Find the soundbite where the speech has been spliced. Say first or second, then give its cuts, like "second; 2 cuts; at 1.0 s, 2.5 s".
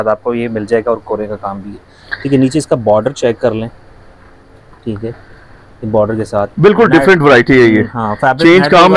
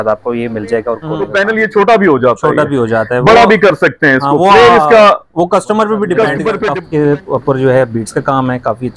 second; 2 cuts; at 1.2 s, 6.7 s